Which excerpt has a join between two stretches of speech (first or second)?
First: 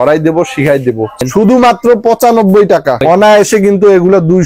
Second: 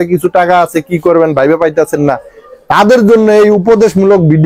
first